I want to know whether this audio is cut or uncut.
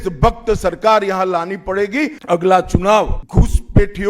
cut